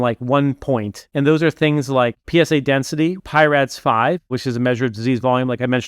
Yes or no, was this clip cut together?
yes